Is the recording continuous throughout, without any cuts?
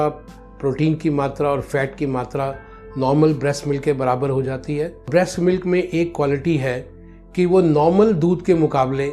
no; 1 cut; at 5.1 s

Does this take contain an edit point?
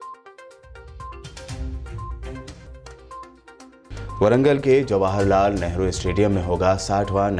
yes; 1 cut; at 2.7 s

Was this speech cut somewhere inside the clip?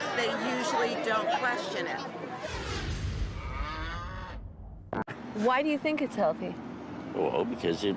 no; 0 cuts

